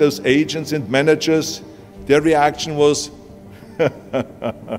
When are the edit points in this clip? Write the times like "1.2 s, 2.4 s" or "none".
none